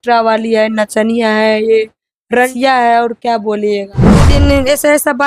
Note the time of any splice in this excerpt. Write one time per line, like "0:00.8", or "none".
0:02.1
0:04.3